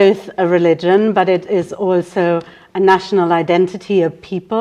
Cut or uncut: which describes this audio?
uncut